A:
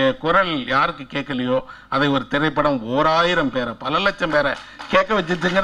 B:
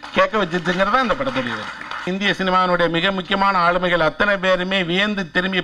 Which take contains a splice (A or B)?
B